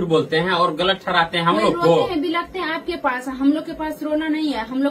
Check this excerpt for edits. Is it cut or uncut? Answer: uncut